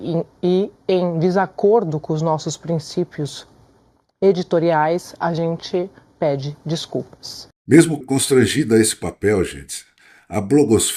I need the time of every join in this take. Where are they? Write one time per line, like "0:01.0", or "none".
none